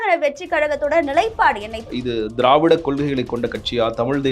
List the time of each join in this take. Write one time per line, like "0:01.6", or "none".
0:01.9